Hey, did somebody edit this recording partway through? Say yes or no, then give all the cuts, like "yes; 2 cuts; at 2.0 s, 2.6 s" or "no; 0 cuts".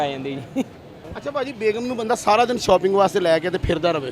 no; 0 cuts